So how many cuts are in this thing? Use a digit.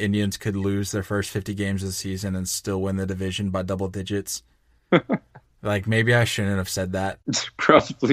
1